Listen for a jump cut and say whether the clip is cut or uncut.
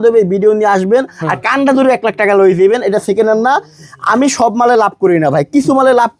uncut